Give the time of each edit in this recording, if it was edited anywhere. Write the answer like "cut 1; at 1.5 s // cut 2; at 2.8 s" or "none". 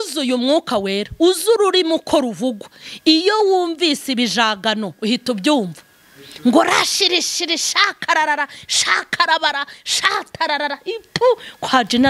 none